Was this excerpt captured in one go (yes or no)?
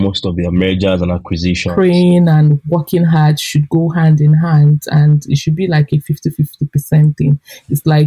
no